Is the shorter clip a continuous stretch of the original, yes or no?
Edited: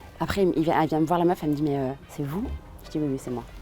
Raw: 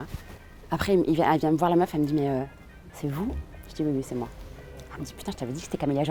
no